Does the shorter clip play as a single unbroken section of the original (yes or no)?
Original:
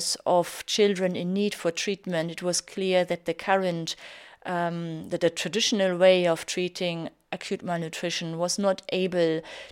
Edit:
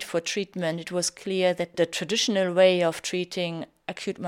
no